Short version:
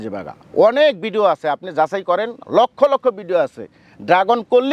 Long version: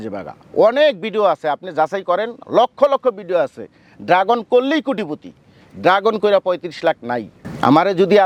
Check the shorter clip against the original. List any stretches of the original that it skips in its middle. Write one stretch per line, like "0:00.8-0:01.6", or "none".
none